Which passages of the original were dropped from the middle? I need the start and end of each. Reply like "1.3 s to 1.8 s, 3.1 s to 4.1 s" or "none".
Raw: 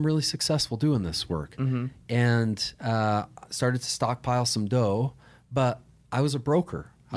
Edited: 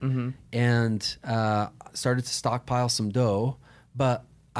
none